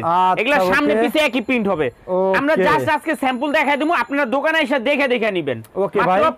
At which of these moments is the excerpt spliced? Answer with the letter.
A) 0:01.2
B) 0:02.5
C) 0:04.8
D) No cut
D